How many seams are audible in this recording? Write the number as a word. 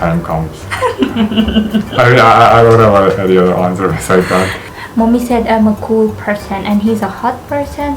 one